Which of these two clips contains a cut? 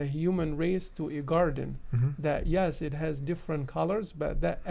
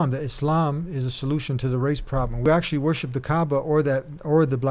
second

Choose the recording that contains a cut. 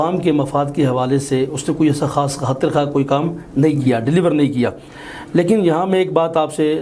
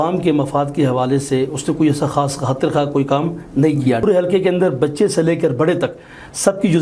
second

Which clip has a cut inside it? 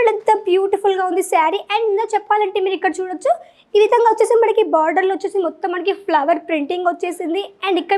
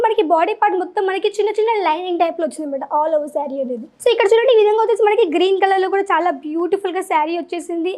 second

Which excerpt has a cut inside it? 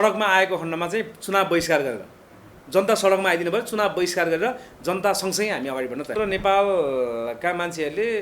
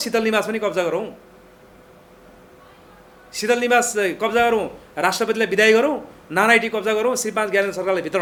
first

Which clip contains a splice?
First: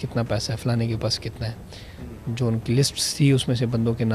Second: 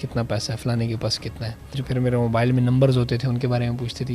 second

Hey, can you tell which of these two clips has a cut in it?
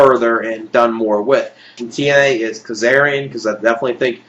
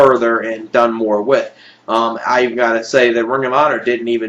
second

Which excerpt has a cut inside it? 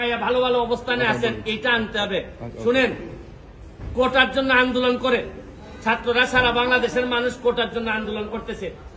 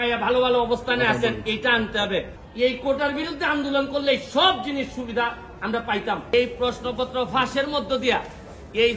second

